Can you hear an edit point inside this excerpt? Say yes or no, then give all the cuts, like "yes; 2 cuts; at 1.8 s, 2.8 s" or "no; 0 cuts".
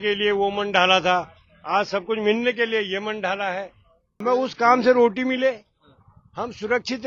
yes; 1 cut; at 4.2 s